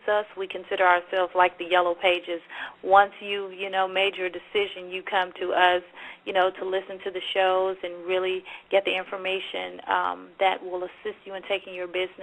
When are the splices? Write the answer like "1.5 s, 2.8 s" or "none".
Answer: none